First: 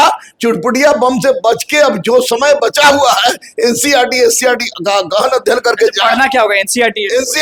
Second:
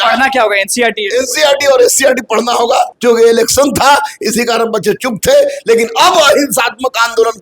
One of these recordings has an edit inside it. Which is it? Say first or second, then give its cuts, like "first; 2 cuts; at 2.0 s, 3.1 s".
second; 1 cut; at 2.9 s